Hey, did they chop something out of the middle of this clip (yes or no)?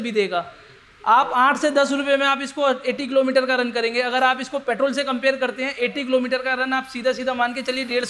no